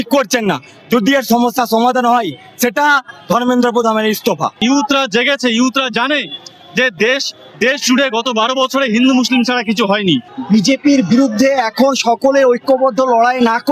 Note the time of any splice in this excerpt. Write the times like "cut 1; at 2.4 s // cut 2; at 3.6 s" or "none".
cut 1; at 4.6 s // cut 2; at 10.3 s

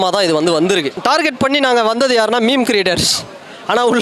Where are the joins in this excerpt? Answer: cut 1; at 1.0 s

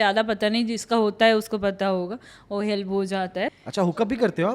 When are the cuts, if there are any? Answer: cut 1; at 3.5 s

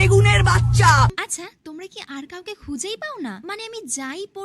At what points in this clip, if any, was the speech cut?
cut 1; at 1.0 s

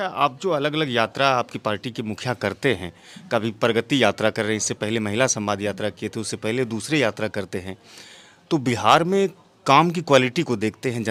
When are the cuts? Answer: none

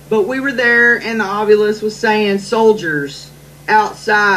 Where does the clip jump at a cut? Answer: cut 1; at 2.4 s

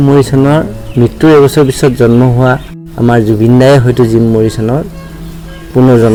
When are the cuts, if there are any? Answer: none

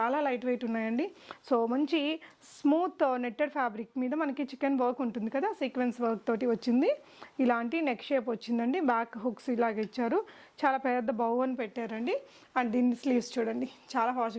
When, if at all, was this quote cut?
none

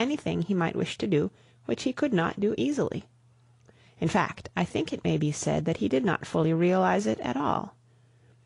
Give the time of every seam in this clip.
none

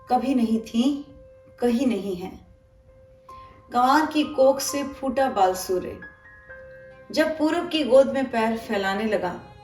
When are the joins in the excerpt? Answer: none

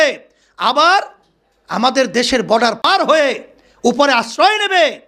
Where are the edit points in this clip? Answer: cut 1; at 2.8 s

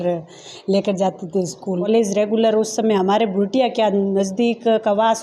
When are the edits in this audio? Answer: cut 1; at 1.9 s

